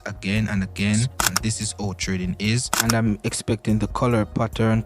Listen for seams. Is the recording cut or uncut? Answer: cut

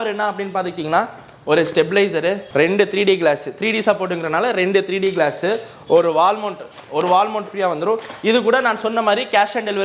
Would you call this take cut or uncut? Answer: uncut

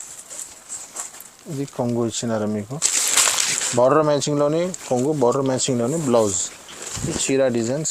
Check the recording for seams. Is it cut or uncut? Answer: uncut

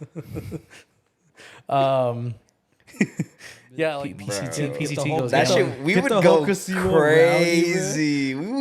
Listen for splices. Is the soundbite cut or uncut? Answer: cut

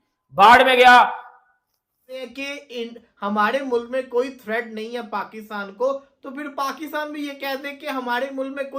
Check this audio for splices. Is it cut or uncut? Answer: cut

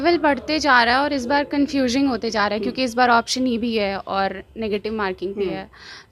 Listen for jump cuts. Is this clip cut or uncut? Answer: uncut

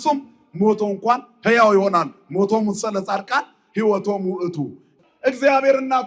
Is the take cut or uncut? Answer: cut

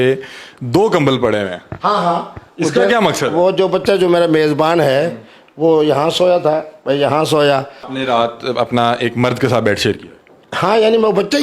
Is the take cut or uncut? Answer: cut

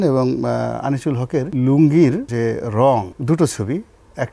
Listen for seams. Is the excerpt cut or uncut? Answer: cut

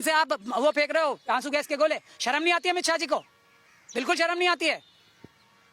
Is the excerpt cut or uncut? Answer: uncut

